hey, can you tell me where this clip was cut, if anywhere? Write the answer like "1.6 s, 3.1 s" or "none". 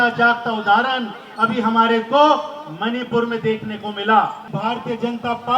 4.5 s